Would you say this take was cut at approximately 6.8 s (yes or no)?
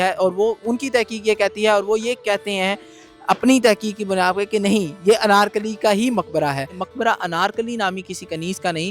yes